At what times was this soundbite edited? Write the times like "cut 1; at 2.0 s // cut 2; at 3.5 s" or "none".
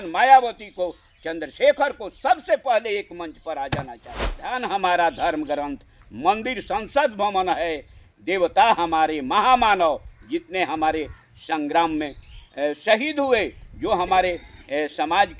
cut 1; at 4.5 s